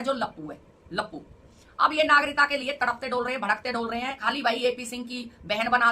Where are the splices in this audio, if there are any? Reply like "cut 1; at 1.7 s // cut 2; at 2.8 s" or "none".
cut 1; at 1.5 s // cut 2; at 4.2 s